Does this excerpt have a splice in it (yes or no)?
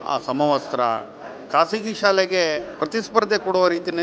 yes